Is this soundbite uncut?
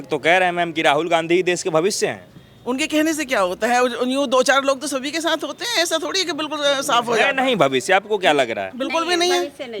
yes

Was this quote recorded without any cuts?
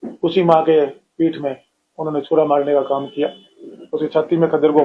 yes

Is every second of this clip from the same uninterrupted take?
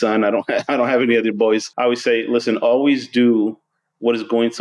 no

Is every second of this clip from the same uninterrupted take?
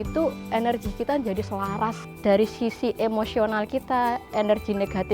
no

